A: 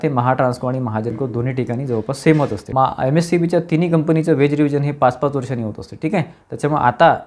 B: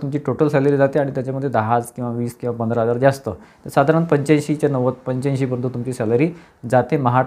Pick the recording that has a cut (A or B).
A